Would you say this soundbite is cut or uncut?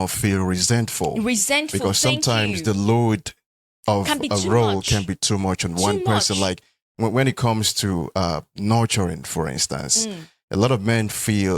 uncut